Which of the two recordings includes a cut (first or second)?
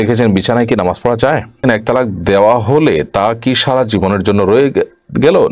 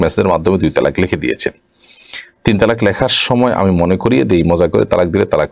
first